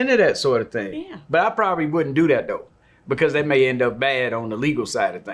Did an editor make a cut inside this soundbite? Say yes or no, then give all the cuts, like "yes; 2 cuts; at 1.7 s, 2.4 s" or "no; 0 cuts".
no; 0 cuts